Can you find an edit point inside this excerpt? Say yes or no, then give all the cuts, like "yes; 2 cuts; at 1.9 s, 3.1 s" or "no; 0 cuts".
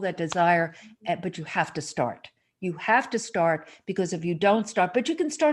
no; 0 cuts